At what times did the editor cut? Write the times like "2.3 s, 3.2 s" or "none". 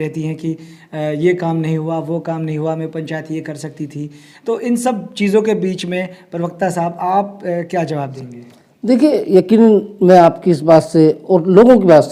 none